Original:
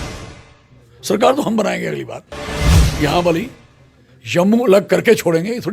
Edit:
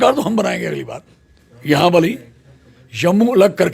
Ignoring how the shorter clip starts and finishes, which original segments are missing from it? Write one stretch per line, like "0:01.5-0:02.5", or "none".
0:02.7-0:02.9